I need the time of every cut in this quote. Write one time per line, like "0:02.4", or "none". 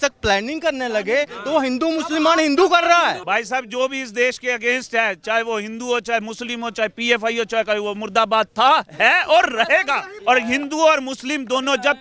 0:03.2
0:10.1